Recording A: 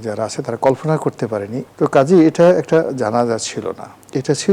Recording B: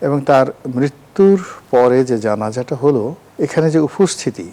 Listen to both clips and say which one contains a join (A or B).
A